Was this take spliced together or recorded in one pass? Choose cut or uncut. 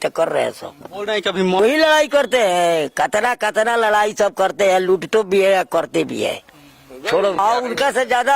cut